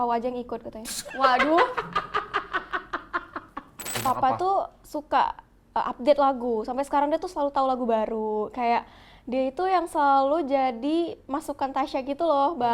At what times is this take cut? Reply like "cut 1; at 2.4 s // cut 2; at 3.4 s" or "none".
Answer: cut 1; at 3.9 s